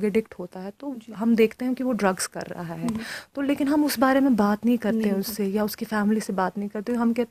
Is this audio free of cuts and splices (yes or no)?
yes